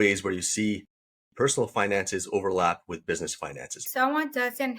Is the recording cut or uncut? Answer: cut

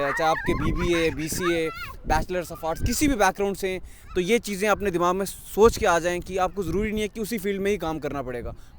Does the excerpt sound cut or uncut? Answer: uncut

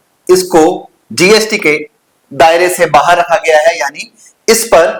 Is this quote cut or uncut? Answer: uncut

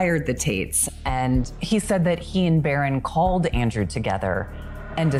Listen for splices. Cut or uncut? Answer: uncut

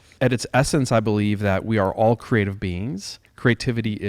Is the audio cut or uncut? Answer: uncut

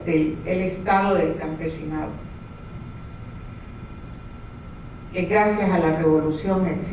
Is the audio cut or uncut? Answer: cut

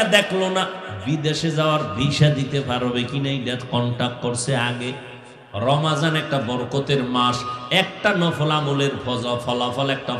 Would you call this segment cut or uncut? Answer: cut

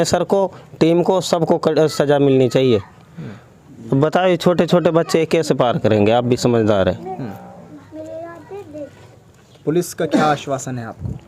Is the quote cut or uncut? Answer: uncut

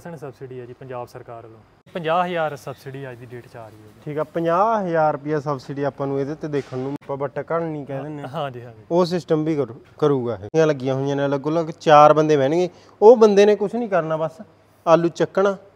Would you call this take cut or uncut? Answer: cut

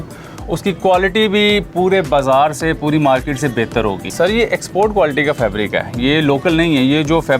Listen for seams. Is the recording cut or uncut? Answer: cut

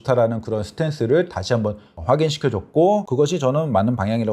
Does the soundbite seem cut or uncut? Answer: cut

